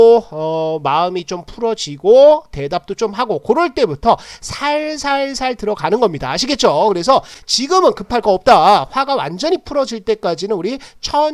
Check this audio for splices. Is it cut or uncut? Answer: uncut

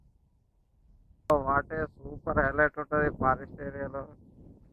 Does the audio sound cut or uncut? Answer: cut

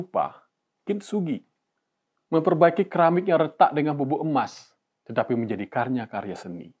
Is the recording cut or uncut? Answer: uncut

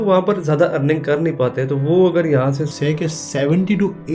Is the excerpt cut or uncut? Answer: cut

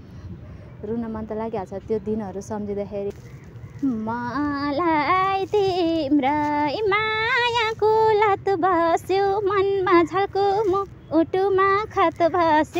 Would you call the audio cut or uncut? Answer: cut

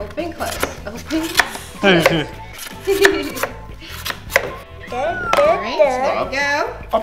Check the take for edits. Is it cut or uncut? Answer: uncut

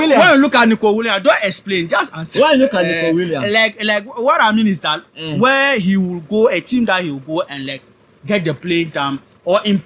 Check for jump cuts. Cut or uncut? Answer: uncut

